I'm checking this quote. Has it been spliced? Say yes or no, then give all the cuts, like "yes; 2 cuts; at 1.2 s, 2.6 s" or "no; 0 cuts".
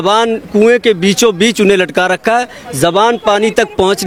no; 0 cuts